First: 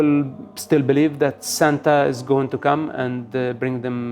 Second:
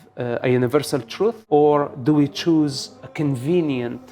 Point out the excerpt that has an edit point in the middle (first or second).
second